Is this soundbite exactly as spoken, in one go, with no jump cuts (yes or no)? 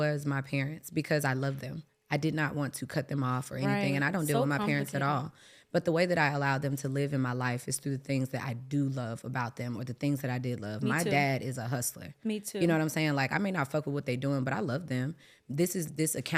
yes